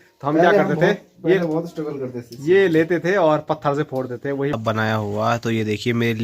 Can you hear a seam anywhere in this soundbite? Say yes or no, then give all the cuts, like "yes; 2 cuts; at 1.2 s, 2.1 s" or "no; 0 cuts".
yes; 1 cut; at 4.5 s